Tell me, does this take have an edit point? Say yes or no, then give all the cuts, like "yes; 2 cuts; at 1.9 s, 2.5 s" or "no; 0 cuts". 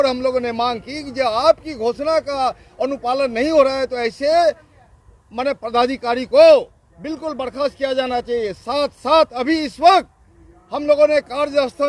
no; 0 cuts